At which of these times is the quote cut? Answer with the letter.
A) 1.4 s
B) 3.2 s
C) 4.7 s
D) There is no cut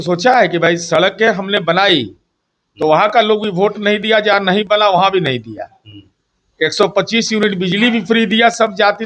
D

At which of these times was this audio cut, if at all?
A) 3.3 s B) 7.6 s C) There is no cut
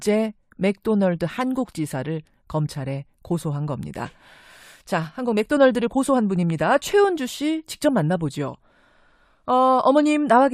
B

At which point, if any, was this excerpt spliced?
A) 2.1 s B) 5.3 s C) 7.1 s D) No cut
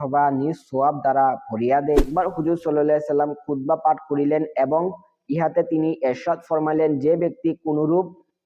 A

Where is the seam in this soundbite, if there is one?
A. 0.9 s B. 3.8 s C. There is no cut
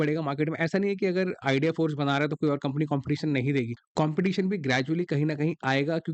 B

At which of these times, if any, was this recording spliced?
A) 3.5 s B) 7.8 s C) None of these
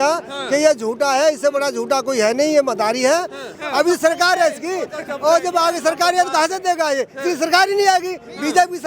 A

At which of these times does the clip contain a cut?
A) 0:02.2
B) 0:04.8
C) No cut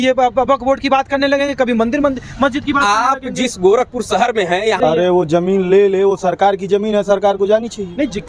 B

